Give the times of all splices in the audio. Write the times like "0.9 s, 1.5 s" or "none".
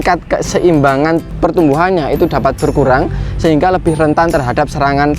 1.3 s